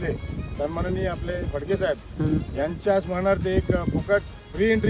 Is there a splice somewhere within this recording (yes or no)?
no